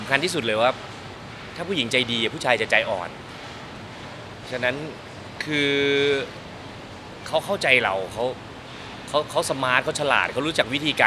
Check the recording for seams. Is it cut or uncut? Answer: uncut